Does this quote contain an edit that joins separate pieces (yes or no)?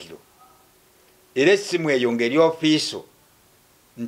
no